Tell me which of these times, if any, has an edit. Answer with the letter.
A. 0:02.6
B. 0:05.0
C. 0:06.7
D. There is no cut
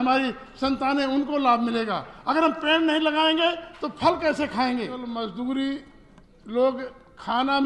B